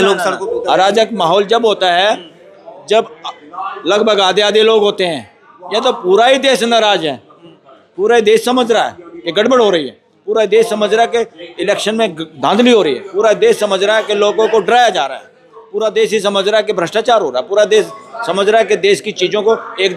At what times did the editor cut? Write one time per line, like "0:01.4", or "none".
none